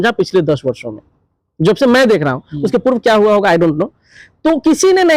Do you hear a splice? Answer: no; 0 cuts

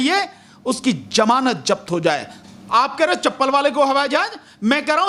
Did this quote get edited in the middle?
yes; 1 cut; at 2.6 s

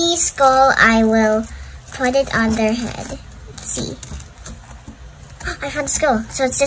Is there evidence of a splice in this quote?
no; 0 cuts

